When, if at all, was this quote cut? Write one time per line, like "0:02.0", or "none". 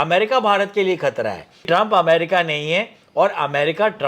0:01.6